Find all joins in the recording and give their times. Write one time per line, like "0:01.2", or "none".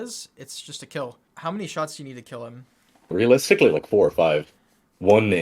0:01.3
0:03.1